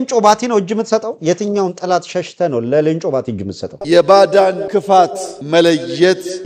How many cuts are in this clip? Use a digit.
1